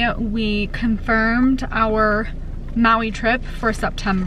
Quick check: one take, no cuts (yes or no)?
yes